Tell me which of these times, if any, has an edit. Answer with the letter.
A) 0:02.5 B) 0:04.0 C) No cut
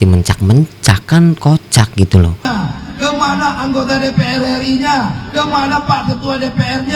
A